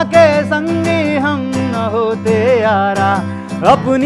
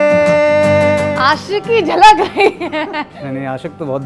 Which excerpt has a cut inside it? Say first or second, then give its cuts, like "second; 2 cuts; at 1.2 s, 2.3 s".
second; 2 cuts; at 1.1 s, 3.2 s